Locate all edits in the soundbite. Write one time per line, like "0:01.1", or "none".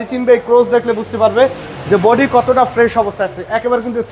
none